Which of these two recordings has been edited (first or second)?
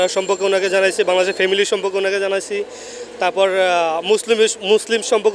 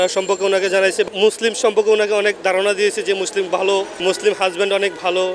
second